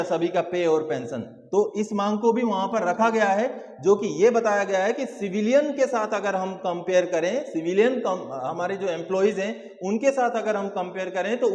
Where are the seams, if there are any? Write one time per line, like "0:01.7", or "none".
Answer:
none